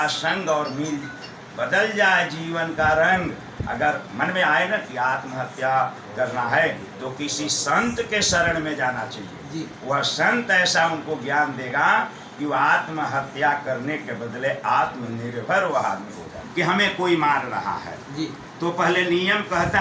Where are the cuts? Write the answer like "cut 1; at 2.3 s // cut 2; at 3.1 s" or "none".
cut 1; at 16.4 s